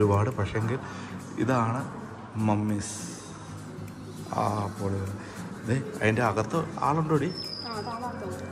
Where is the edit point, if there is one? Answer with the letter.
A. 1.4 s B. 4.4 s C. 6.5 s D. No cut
D